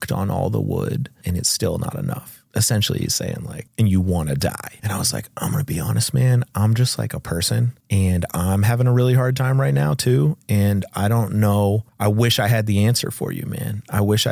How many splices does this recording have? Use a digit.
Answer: 6